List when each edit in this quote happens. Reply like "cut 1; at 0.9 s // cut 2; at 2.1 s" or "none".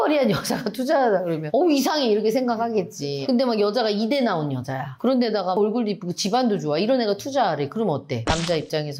none

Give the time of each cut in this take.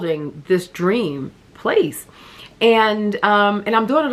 none

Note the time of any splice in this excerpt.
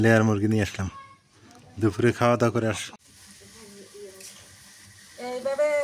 cut 1; at 2.9 s

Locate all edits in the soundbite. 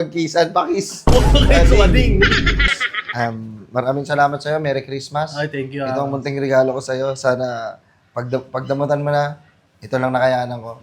cut 1; at 2.7 s

